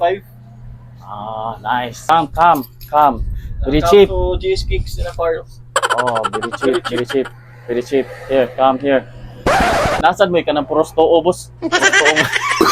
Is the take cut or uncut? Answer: cut